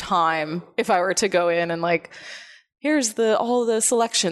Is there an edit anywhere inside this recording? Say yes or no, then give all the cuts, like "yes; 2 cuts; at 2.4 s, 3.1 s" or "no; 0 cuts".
no; 0 cuts